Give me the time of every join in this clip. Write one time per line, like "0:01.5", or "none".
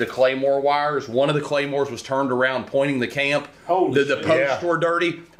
none